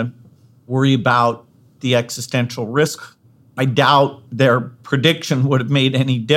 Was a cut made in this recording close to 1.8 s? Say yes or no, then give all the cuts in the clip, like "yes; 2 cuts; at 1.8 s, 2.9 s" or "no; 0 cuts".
yes; 2 cuts; at 1.8 s, 3.0 s